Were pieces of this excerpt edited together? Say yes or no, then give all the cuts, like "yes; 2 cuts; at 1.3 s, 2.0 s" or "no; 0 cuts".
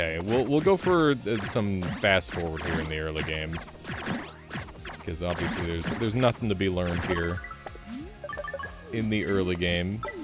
no; 0 cuts